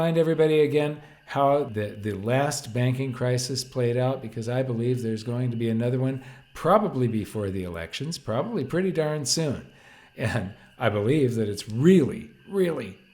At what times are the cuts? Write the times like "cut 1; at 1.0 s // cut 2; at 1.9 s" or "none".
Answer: cut 1; at 1.7 s